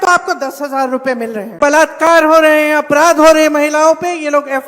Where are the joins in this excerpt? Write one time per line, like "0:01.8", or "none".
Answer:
0:01.6

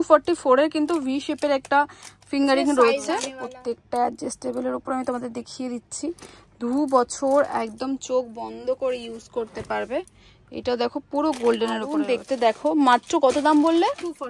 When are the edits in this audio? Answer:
0:03.4
0:12.0

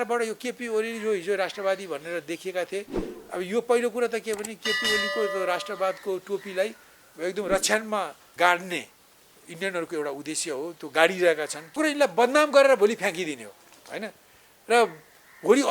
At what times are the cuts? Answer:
0:08.2
0:11.8

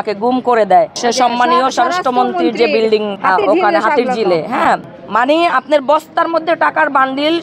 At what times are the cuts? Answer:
0:00.9
0:03.1
0:05.0

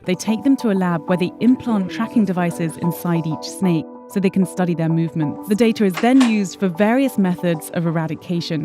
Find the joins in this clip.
0:04.0
0:05.4

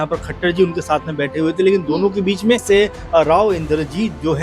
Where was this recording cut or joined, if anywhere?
0:02.6

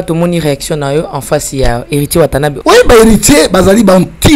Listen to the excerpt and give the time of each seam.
0:02.5

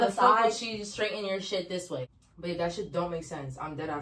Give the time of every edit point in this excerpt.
none

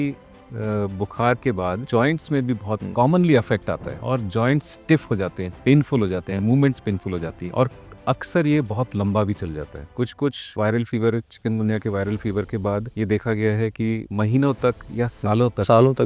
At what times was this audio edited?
none

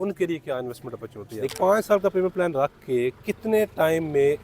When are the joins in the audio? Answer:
0:01.5

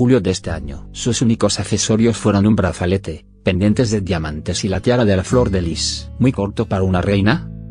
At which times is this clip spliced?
0:03.0

